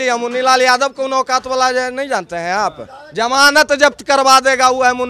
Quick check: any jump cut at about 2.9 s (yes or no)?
no